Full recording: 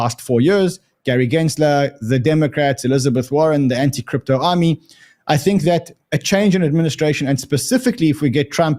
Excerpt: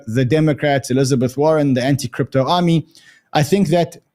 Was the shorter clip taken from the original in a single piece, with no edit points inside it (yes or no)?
yes